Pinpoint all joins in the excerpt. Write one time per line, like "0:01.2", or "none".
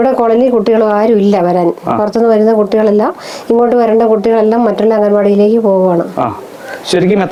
none